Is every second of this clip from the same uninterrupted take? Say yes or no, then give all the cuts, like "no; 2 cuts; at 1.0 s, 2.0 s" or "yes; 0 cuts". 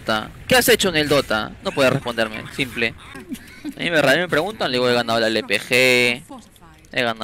yes; 0 cuts